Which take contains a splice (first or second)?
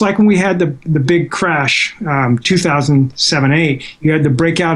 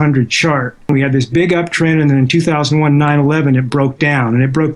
second